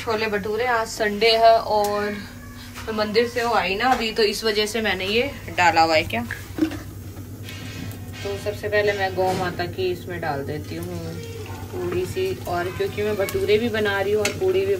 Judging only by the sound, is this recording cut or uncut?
uncut